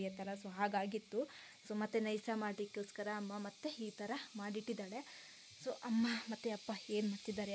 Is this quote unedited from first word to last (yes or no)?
yes